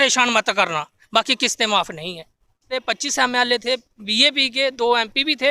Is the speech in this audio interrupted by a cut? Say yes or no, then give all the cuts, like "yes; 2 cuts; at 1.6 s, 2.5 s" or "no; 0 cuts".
yes; 1 cut; at 2.8 s